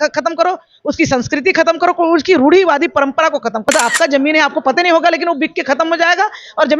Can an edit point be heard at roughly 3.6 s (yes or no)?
yes